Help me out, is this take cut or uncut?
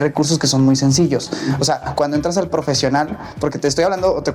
uncut